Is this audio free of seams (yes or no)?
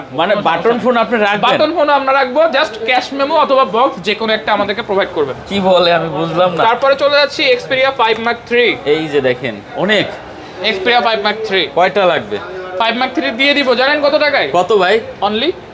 yes